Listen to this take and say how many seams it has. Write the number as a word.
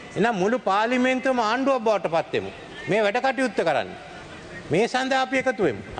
zero